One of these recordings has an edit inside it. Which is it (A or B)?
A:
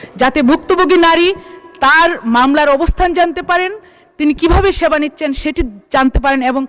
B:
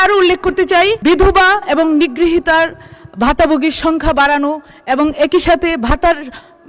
B